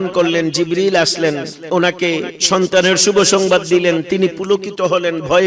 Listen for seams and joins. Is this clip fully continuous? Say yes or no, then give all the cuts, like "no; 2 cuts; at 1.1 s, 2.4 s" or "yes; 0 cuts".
no; 1 cut; at 1.5 s